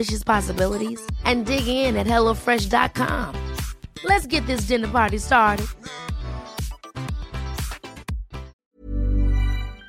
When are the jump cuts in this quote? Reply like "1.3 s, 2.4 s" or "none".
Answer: 8.6 s